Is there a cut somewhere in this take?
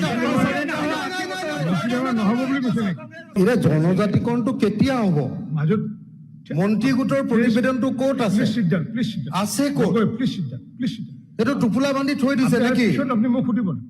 yes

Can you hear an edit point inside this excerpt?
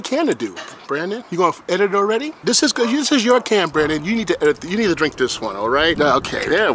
no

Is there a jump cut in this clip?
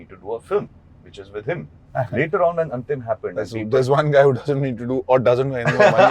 yes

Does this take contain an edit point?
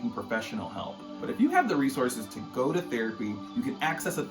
yes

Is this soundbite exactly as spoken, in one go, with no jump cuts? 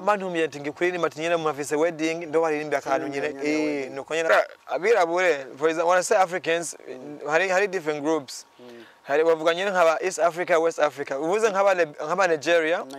no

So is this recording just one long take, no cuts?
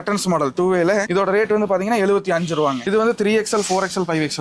no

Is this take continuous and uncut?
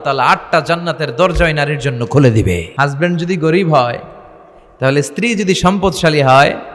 no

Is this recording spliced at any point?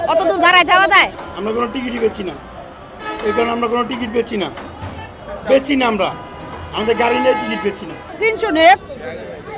yes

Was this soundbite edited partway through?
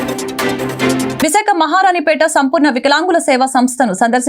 yes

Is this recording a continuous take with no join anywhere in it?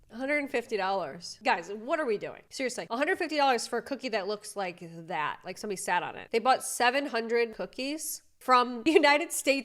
no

